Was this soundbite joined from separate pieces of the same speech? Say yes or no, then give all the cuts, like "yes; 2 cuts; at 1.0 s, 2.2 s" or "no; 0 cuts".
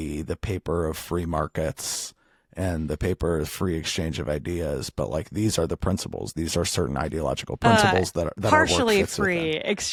no; 0 cuts